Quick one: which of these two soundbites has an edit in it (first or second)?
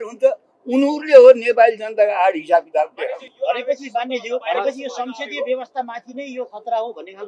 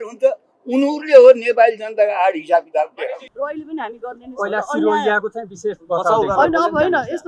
second